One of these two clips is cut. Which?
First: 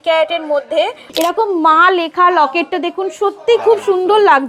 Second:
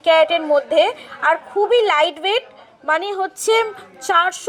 first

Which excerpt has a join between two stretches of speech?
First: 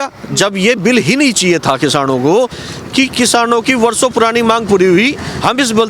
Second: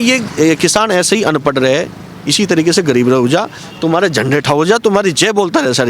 first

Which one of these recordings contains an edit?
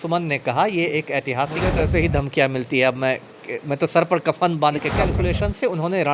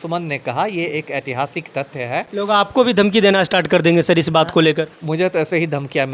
first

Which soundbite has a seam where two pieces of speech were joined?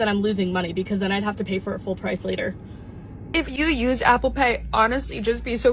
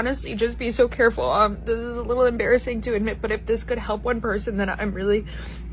first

